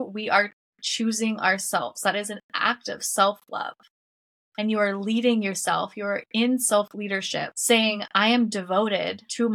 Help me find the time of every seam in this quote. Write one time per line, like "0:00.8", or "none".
none